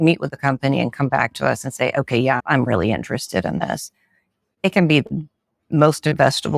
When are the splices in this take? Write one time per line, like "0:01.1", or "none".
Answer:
0:02.4